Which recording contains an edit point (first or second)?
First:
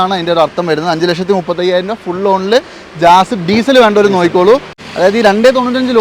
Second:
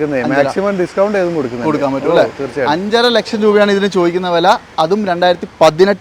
first